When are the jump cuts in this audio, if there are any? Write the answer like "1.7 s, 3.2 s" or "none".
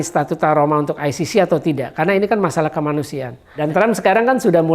3.6 s